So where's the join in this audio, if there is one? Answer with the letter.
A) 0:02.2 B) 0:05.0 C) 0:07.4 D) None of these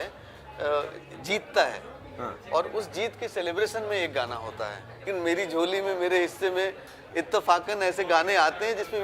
B